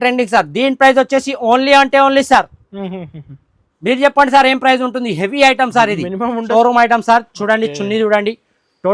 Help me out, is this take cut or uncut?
cut